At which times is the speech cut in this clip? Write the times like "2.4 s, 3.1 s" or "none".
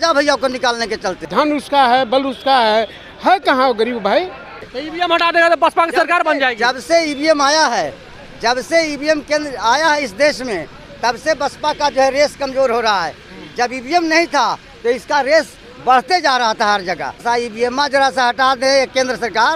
1.3 s, 4.7 s, 17.2 s